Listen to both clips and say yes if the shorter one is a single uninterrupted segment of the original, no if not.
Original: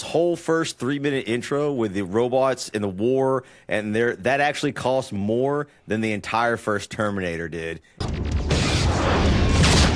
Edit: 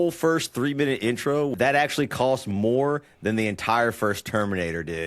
no